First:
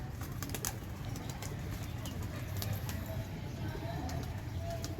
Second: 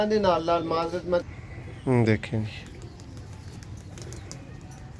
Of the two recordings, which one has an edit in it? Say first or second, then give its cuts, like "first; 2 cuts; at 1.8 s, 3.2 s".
second; 1 cut; at 1.2 s